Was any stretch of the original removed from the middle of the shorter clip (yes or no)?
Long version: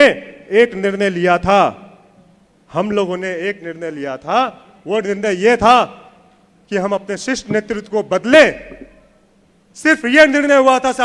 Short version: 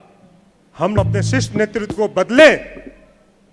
yes